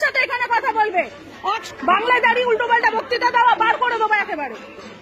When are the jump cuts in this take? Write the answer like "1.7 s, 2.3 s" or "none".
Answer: 1.6 s